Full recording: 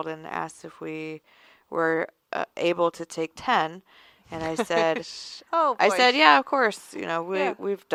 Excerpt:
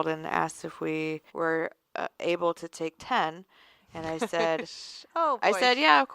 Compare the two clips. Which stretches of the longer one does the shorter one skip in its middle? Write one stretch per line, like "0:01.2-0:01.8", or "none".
0:01.3-0:01.6